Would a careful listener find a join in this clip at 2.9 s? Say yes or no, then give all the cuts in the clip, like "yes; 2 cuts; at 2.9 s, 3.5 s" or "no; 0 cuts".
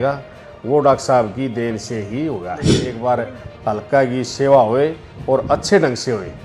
yes; 1 cut; at 2.9 s